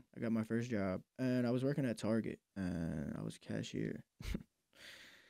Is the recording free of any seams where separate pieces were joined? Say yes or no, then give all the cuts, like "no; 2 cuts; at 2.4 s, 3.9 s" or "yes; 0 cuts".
no; 3 cuts; at 1.1 s, 2.4 s, 4.1 s